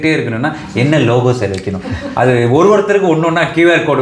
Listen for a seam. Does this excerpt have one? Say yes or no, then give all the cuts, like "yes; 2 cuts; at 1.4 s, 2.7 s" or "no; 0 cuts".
no; 0 cuts